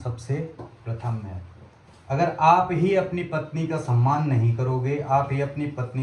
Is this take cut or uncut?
uncut